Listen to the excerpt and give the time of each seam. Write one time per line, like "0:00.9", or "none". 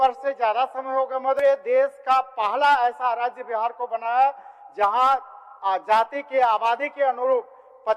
0:01.4